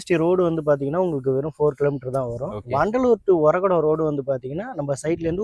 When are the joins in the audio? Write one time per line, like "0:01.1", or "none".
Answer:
none